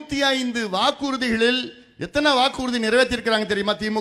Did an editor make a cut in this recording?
no; 0 cuts

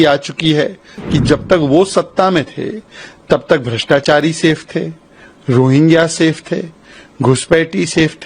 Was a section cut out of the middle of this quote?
yes; 1 cut; at 0.9 s

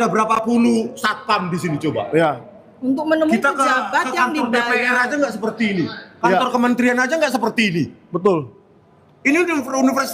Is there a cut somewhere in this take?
no; 0 cuts

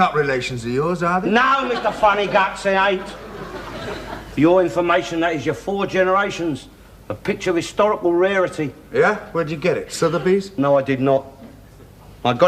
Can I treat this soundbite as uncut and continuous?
no; 1 cut; at 7.7 s

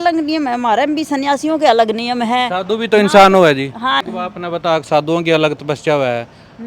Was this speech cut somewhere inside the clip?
yes; 1 cut; at 4.0 s

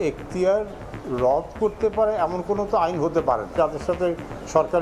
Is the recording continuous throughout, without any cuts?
no; 1 cut; at 3.5 s

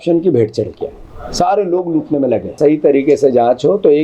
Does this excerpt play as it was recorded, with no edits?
no; 1 cut; at 2.5 s

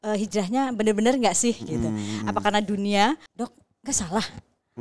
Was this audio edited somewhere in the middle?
yes; 1 cut; at 3.3 s

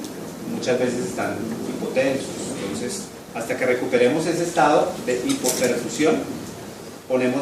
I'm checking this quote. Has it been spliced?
yes; 1 cut; at 2.8 s

